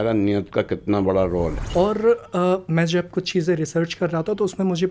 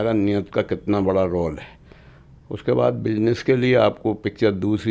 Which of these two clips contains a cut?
first; 1 cut; at 1.6 s

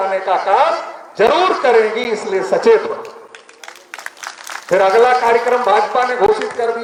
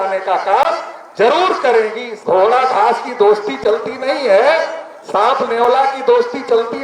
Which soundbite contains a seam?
second; 1 cut; at 2.1 s

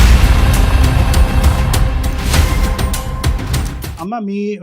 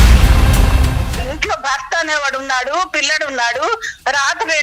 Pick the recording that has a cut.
second; 1 cut; at 1.1 s

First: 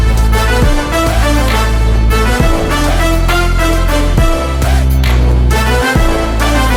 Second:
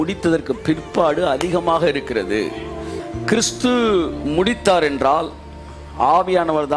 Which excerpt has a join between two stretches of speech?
second; 1 cut; at 2.9 s

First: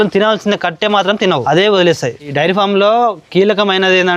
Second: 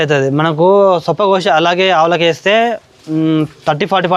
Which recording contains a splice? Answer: first; 2 cuts; at 1.4 s, 2.2 s

